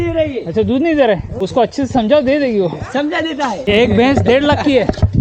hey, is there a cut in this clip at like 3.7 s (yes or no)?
yes